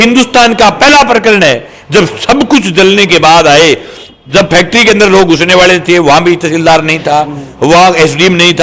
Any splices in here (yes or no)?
no